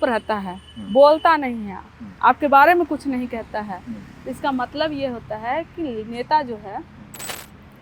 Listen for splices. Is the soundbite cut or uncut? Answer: uncut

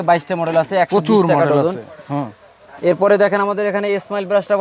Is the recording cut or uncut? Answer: uncut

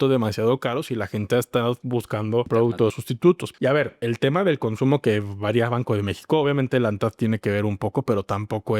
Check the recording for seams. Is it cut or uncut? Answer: cut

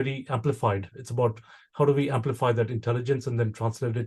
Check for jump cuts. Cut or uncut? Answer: uncut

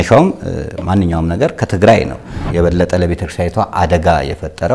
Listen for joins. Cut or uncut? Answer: cut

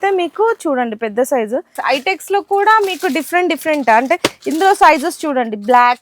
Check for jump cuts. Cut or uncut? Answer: cut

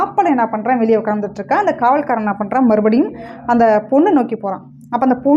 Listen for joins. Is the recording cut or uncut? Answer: uncut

